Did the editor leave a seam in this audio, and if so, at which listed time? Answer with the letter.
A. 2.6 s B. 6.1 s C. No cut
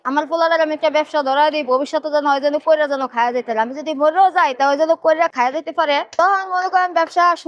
B